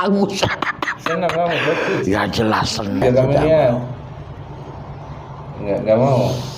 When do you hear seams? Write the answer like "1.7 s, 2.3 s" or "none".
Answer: 3.0 s